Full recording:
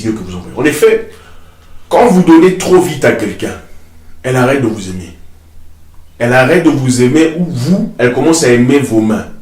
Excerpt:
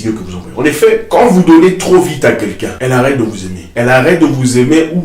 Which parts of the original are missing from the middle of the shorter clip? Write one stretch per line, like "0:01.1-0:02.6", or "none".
0:01.0-0:01.8
0:03.5-0:04.1
0:05.0-0:06.0